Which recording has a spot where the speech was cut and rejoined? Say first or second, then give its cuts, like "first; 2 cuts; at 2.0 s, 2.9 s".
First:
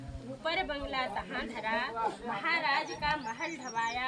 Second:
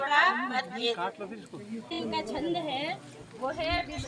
second; 1 cut; at 2.0 s